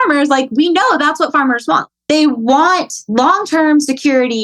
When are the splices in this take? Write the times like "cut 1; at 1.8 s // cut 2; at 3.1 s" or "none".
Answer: cut 1; at 1.8 s // cut 2; at 2.9 s